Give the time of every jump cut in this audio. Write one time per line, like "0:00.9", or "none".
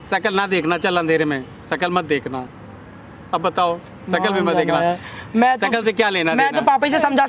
none